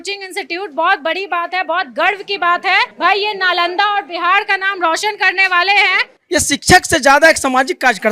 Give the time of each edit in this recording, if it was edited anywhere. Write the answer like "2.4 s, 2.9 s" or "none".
2.9 s, 6.1 s